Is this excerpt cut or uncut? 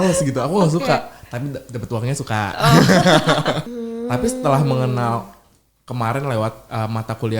cut